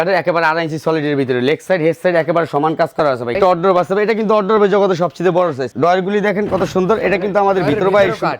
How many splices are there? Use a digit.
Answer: 2